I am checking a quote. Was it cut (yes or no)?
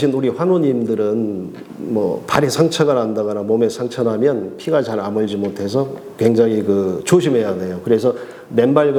no